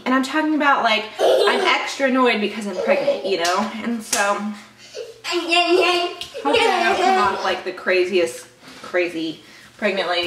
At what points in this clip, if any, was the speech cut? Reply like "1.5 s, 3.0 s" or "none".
none